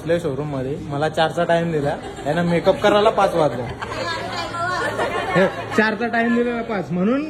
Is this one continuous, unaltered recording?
yes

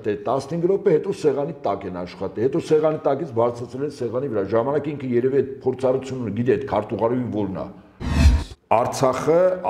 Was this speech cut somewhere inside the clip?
yes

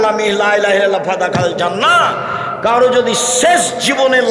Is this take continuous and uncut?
yes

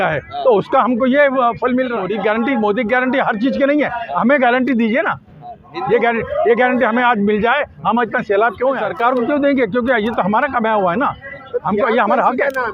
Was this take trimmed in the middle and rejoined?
yes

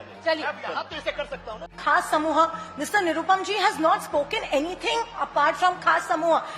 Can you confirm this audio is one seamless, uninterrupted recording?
no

